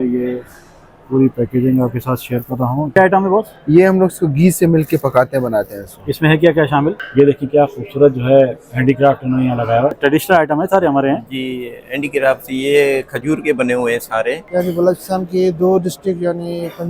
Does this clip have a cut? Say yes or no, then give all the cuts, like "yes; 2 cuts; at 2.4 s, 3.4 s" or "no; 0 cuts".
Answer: yes; 4 cuts; at 2.9 s, 7.0 s, 10.0 s, 14.5 s